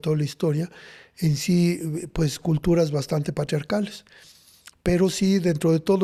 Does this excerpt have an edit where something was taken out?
no; 0 cuts

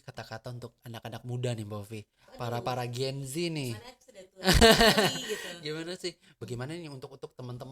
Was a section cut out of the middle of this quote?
yes; 1 cut; at 6.4 s

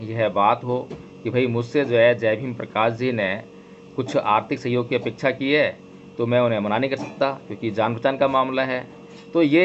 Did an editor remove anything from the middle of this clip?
no; 0 cuts

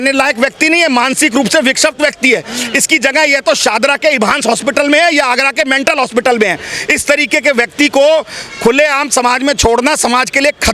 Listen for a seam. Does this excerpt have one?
no; 0 cuts

